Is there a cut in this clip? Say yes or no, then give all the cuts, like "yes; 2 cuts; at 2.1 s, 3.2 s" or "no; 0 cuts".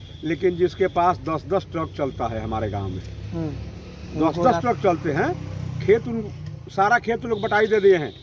no; 0 cuts